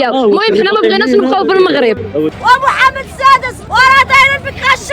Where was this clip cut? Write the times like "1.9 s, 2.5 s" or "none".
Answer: 2.4 s, 3.5 s